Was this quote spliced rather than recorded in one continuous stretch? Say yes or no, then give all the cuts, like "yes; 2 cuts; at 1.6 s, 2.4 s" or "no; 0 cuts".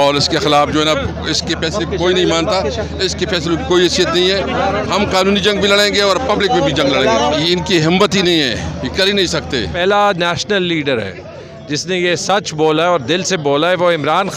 yes; 2 cuts; at 7.4 s, 9.7 s